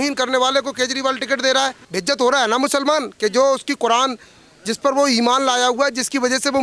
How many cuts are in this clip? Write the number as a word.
one